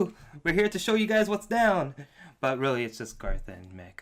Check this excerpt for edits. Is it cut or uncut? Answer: uncut